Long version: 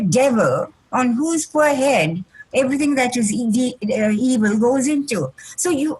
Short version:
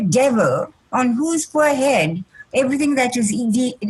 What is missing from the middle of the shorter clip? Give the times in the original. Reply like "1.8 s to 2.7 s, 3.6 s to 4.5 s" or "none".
none